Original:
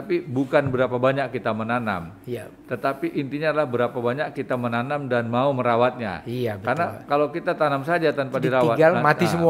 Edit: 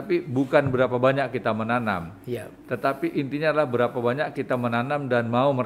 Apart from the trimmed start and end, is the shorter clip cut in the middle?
no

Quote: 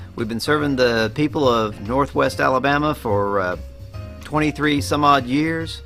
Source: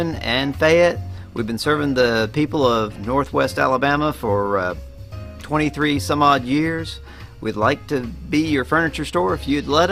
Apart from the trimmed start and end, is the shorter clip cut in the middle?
no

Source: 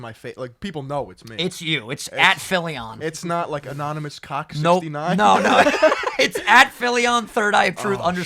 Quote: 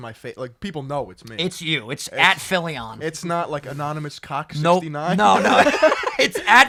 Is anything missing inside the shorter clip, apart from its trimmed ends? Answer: no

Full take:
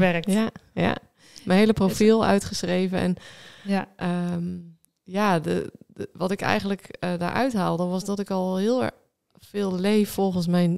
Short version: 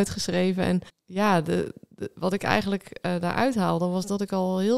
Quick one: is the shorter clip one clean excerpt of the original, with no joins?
no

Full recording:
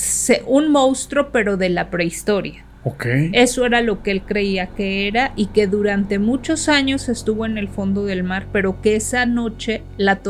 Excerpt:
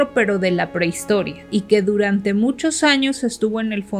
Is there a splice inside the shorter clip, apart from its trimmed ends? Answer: yes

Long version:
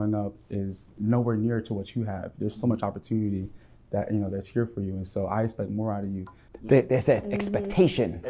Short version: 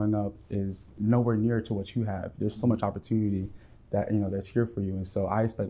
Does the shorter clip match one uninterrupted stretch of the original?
yes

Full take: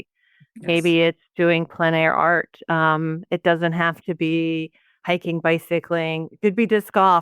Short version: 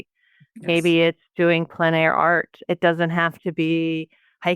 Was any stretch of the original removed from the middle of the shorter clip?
yes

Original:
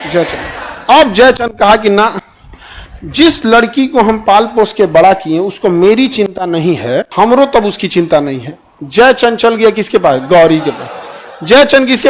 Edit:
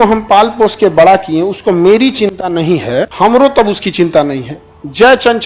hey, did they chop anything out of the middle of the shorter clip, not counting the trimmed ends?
no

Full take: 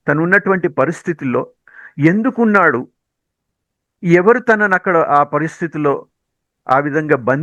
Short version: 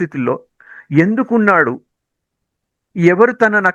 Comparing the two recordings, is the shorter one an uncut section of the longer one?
yes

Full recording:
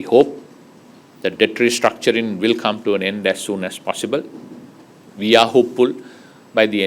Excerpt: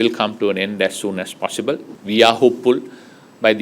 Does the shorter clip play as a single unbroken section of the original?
no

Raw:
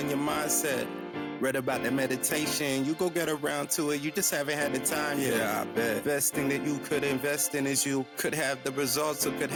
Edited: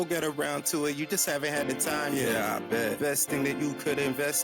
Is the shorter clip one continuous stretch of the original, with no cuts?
yes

